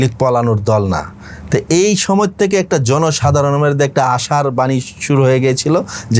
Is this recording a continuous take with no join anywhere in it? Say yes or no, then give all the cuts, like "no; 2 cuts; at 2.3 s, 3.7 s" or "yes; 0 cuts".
yes; 0 cuts